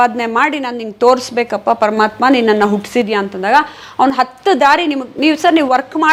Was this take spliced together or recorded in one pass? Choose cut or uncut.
uncut